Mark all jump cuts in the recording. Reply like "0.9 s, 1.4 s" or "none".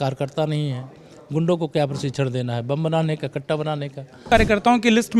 4.3 s